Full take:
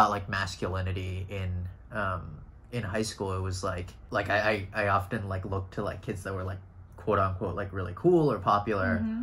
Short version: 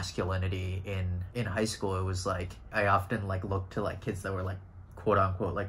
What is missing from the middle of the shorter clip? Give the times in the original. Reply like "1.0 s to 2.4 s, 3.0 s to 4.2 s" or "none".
1.6 s to 2.6 s, 4.0 s to 4.7 s